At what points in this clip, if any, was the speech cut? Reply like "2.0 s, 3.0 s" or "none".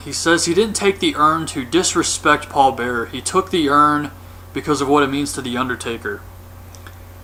none